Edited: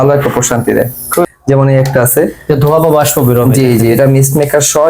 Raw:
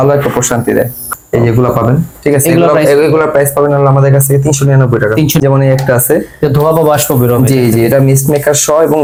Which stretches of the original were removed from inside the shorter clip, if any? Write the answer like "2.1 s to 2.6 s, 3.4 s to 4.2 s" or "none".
1.3 s to 5.3 s